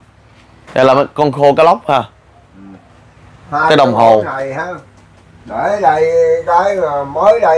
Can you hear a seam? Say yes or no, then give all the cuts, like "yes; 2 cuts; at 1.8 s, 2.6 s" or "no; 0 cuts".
no; 0 cuts